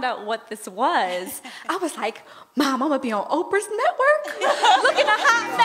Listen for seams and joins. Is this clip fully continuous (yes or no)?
yes